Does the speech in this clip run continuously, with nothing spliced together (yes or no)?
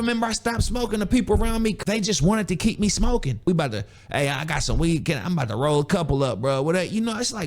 no